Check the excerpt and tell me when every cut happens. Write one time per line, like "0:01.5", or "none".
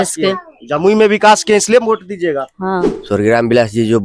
0:03.0